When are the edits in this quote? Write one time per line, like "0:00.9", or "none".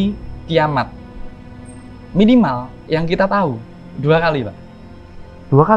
none